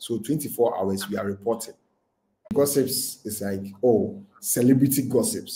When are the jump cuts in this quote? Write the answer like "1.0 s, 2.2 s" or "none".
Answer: 2.5 s